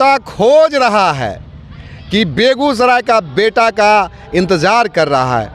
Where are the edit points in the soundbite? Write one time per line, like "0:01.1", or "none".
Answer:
none